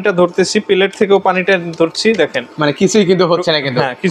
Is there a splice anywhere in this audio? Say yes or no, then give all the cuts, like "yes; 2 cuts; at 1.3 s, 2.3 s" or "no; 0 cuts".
no; 0 cuts